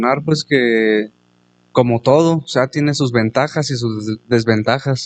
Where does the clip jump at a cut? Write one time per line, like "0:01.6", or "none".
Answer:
none